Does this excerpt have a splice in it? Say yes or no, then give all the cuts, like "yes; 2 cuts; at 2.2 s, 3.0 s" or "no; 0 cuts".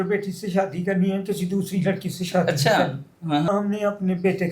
yes; 1 cut; at 3.5 s